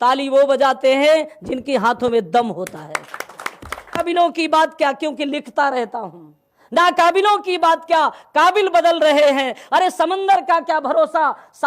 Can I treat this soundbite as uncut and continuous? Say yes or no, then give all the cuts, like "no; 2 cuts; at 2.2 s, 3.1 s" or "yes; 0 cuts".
no; 1 cut; at 4.0 s